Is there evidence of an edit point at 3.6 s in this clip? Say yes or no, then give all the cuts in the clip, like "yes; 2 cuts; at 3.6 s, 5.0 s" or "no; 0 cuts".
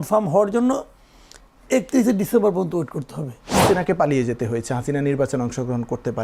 yes; 1 cut; at 3.6 s